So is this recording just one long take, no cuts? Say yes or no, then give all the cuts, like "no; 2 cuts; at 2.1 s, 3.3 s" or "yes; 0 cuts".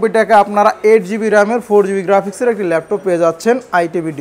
yes; 0 cuts